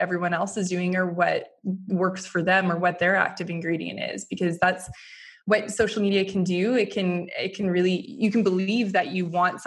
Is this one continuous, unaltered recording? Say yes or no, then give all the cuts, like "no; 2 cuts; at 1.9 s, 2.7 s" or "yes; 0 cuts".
yes; 0 cuts